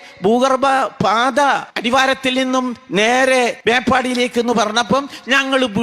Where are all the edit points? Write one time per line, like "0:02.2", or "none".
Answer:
0:01.7
0:03.6